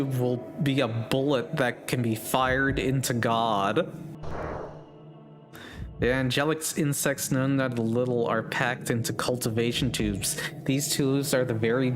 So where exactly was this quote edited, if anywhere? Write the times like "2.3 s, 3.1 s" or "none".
4.1 s